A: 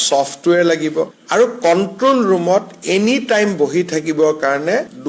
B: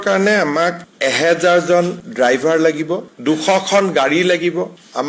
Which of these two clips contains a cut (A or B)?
B